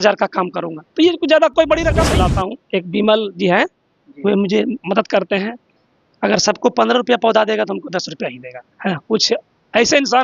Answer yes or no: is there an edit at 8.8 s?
no